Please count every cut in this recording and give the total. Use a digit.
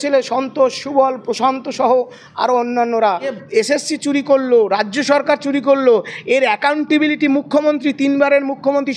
1